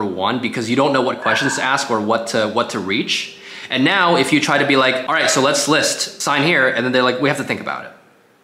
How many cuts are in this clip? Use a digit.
2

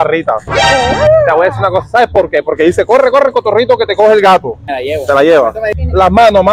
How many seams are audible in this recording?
1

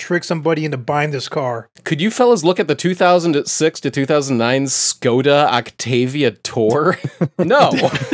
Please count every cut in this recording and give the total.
1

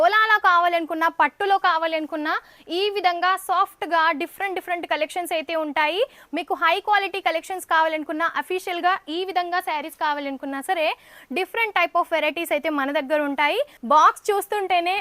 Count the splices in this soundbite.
1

